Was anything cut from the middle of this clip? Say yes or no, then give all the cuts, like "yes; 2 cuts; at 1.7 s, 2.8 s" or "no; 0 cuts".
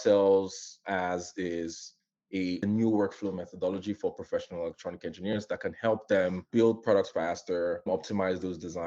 yes; 3 cuts; at 2.6 s, 6.5 s, 7.9 s